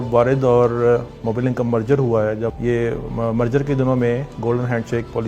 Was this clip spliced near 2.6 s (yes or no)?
yes